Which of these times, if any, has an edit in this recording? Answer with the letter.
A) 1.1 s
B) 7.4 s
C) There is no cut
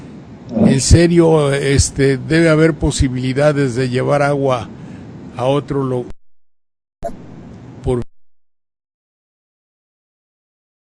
A